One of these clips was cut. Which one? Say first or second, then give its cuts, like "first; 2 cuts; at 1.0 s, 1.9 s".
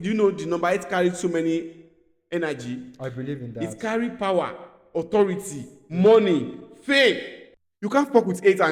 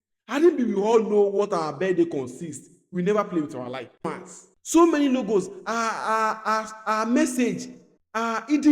second; 1 cut; at 4.0 s